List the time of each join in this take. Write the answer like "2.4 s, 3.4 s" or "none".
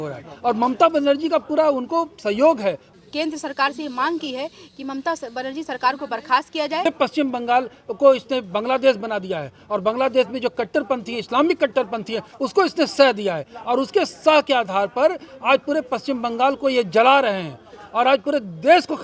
2.9 s, 6.9 s